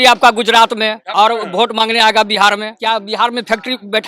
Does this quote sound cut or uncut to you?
cut